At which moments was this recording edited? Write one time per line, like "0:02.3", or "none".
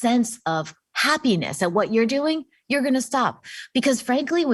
0:03.4